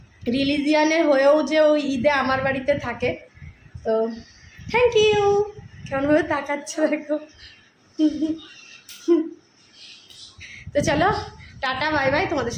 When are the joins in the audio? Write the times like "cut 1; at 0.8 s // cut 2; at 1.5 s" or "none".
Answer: none